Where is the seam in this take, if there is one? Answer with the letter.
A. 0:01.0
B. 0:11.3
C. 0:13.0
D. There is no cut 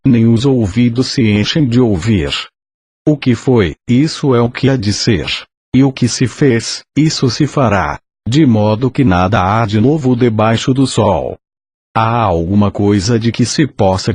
C